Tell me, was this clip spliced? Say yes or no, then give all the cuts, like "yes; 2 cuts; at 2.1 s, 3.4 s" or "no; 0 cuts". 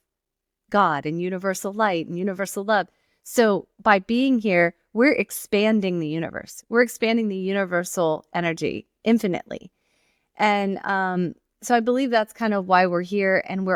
no; 0 cuts